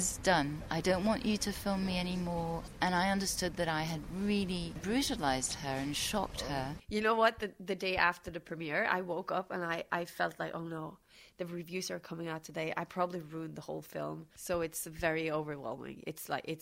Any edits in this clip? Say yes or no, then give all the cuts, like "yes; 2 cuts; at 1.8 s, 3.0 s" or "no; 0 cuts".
yes; 3 cuts; at 4.8 s, 6.8 s, 14.3 s